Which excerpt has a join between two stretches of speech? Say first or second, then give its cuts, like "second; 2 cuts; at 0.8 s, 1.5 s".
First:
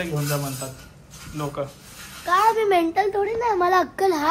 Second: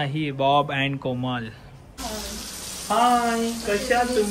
second; 1 cut; at 1.8 s